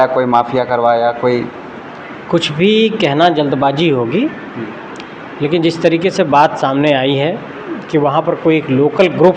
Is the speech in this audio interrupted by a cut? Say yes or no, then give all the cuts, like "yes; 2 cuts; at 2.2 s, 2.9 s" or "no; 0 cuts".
no; 0 cuts